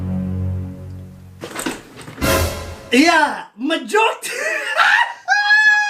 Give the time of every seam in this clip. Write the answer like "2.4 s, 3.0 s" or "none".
1.2 s